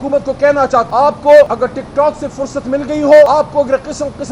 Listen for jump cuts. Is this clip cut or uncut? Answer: cut